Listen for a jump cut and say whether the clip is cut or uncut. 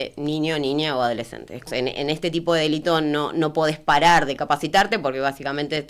cut